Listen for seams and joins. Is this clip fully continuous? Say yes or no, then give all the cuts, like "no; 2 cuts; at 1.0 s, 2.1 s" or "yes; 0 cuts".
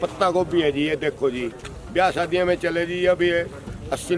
yes; 0 cuts